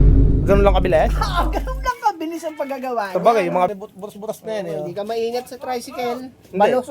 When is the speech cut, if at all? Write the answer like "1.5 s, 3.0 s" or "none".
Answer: 3.7 s